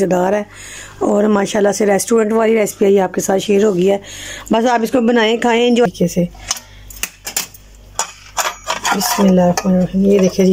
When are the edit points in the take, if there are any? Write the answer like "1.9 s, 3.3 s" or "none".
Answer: 5.9 s